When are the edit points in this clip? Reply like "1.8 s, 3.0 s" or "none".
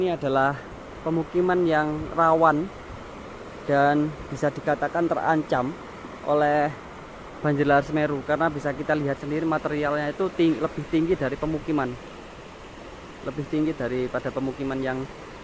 0.9 s